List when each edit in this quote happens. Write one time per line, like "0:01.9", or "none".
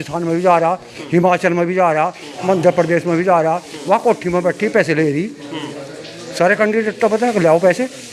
none